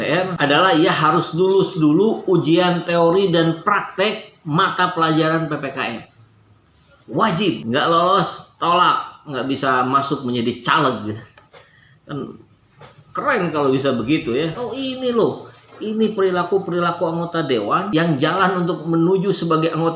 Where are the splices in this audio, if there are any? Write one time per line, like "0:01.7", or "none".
0:14.5

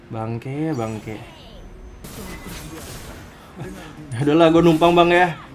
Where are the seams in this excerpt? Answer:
0:02.1

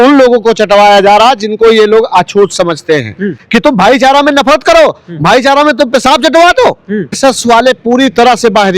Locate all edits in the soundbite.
0:03.3
0:07.2

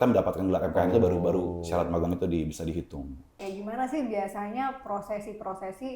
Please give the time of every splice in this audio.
0:03.4

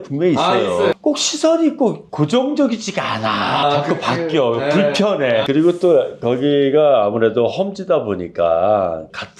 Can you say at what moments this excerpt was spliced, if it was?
0:00.9
0:03.6
0:05.4

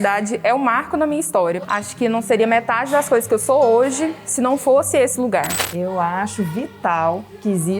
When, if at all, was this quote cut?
0:01.6
0:05.6

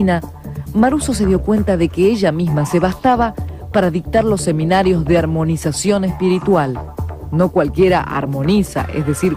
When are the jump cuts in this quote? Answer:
0:05.2

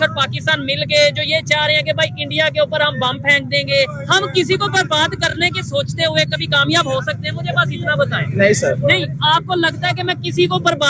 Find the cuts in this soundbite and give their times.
none

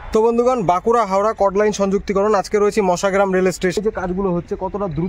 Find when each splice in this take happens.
0:03.8

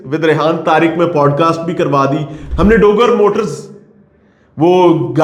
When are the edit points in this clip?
0:02.4

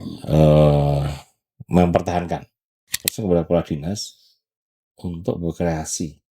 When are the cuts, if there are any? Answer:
0:03.1

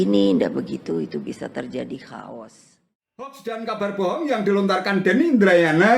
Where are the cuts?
0:03.3

